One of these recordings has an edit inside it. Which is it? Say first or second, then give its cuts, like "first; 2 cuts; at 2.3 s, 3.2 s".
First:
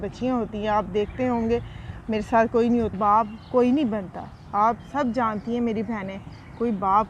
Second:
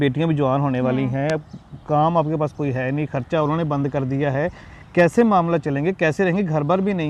first; 1 cut; at 2.9 s